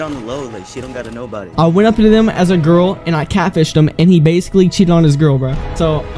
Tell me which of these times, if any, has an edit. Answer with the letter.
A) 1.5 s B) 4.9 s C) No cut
A